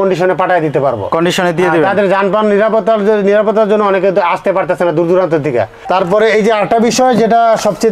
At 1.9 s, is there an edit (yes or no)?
no